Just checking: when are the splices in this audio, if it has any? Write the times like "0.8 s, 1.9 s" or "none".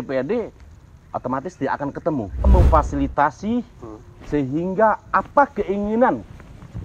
2.5 s

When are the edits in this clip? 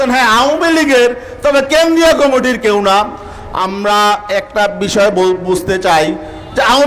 none

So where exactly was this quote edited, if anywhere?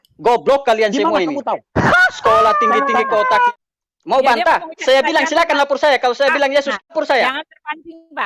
3.5 s, 6.9 s

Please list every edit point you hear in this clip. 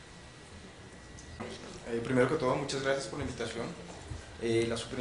none

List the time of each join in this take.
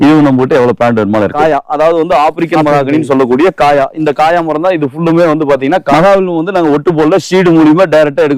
1.3 s, 5.9 s

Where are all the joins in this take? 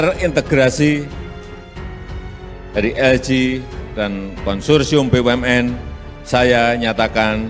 1.1 s, 2.7 s

